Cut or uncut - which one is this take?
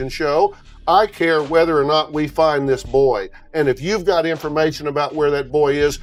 uncut